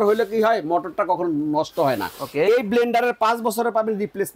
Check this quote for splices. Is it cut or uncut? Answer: uncut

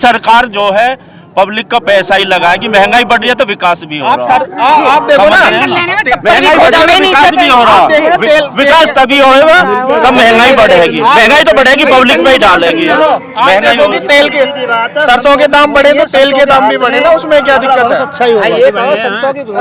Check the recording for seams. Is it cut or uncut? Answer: uncut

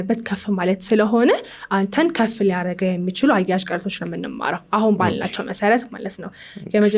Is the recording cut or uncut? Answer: uncut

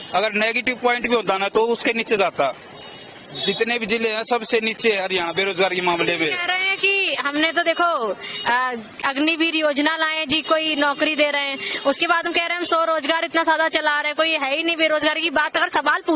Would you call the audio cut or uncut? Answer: uncut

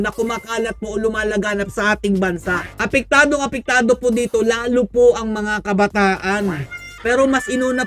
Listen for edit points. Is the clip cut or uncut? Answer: uncut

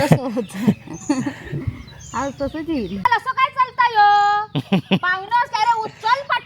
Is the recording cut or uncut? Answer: cut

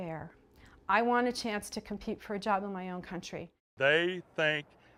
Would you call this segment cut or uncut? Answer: uncut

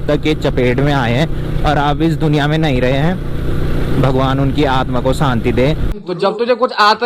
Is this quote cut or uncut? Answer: cut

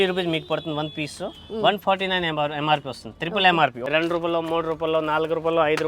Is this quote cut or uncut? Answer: cut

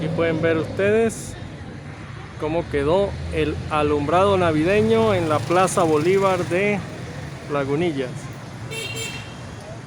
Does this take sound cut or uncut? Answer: uncut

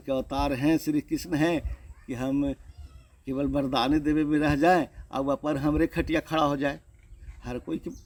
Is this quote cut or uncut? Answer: uncut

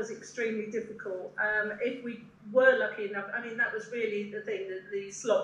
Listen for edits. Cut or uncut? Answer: uncut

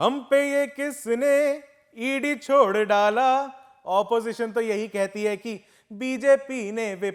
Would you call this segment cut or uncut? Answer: uncut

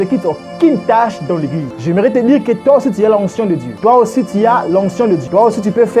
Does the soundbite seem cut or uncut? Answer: cut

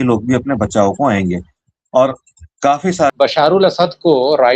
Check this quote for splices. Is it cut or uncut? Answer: cut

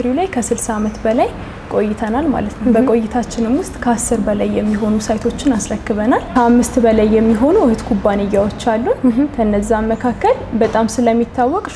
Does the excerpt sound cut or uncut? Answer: cut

